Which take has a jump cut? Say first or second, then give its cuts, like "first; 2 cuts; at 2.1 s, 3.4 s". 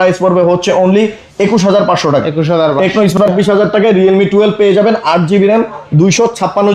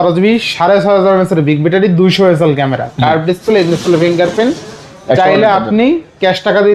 first; 1 cut; at 3.3 s